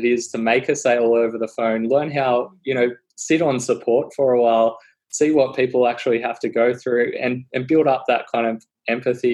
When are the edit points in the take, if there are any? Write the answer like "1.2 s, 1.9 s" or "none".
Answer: none